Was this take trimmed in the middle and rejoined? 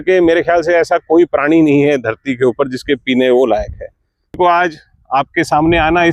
yes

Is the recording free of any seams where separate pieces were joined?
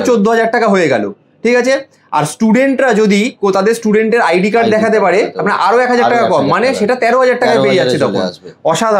yes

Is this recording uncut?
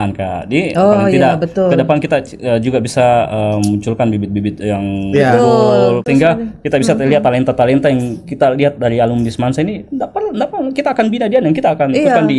no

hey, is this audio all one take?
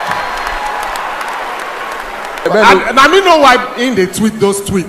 no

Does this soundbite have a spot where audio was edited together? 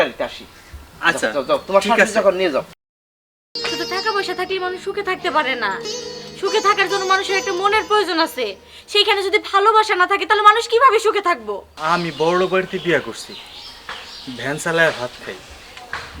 yes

